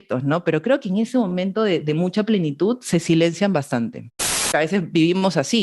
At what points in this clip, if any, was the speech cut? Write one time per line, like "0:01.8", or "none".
0:04.5